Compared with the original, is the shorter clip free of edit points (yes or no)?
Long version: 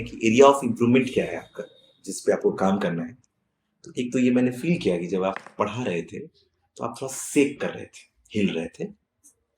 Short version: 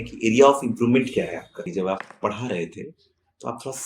no